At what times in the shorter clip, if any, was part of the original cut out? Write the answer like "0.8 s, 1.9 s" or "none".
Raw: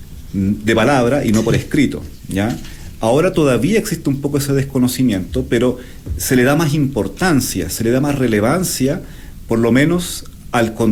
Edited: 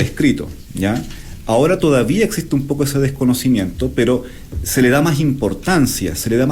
none